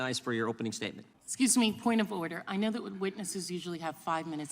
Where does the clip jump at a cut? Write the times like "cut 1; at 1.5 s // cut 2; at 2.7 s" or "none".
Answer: cut 1; at 1.1 s